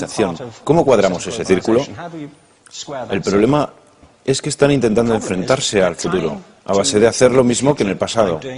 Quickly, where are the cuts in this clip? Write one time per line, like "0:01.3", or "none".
0:04.9